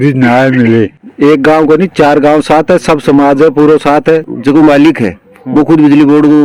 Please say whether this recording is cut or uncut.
cut